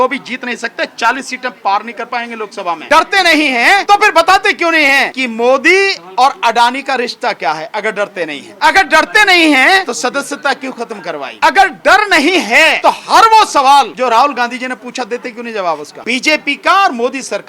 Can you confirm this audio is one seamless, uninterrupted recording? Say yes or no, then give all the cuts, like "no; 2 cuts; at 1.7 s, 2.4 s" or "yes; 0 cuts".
no; 9 cuts; at 2.8 s, 3.8 s, 5.2 s, 8.4 s, 9.8 s, 11.3 s, 12.8 s, 13.9 s, 15.9 s